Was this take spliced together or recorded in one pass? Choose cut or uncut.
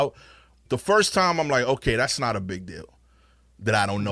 uncut